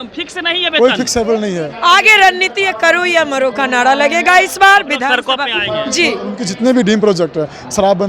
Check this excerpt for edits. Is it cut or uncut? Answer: cut